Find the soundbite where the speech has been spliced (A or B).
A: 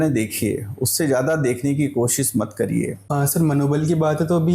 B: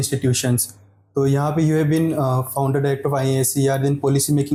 A